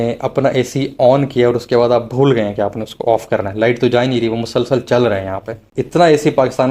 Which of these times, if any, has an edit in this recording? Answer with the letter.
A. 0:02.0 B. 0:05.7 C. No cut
B